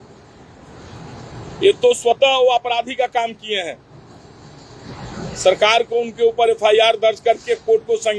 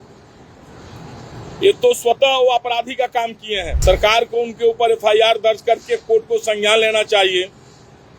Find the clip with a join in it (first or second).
second